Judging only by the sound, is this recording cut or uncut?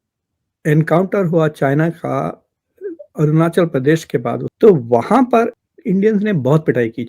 cut